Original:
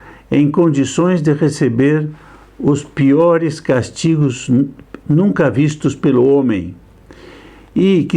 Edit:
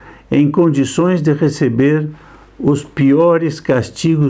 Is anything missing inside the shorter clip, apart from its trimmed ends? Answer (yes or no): no